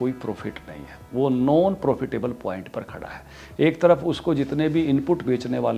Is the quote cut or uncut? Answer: uncut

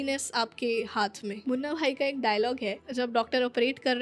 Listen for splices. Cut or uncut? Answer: cut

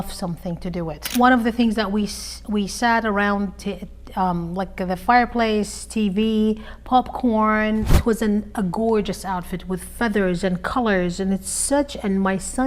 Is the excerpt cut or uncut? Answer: cut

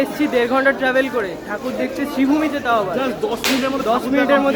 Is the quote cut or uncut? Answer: uncut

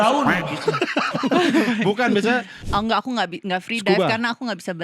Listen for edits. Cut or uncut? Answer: cut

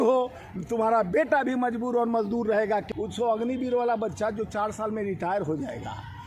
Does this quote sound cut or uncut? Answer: cut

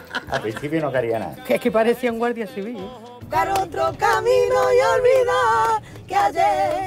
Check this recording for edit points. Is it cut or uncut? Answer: cut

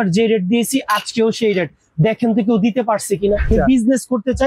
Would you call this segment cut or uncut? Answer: cut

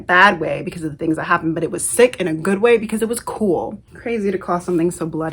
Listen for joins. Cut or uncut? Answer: cut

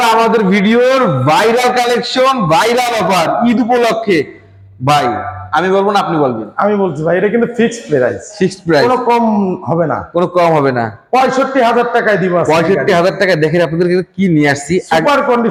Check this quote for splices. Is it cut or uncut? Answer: uncut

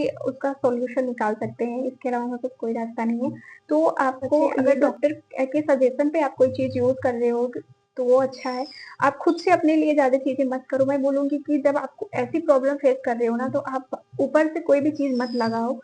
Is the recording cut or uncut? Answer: cut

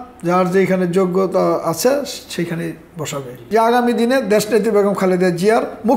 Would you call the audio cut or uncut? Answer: cut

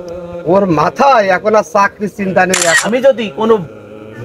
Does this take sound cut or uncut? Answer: cut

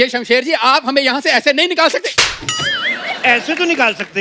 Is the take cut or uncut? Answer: uncut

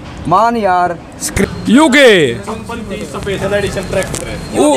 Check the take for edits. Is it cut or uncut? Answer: cut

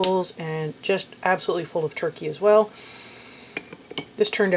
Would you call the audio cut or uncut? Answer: uncut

